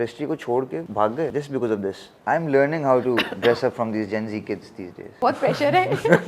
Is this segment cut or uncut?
cut